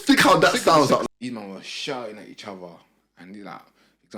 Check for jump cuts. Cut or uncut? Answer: cut